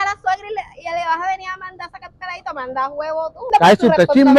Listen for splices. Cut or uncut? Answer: cut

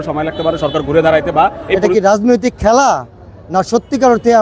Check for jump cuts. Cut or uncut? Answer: cut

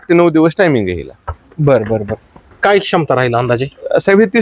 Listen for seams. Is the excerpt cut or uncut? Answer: uncut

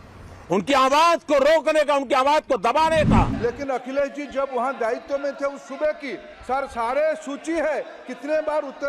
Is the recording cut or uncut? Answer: cut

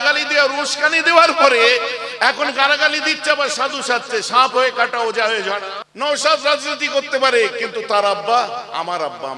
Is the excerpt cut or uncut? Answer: cut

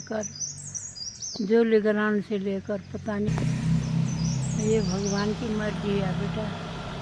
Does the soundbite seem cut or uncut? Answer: cut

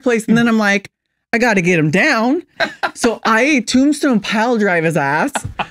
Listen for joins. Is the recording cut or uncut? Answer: cut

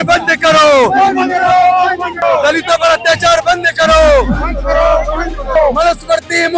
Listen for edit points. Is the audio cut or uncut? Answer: cut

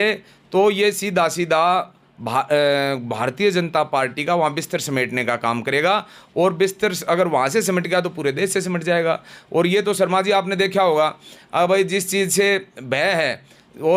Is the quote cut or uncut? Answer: uncut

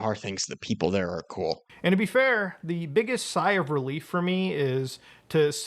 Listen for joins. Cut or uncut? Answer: cut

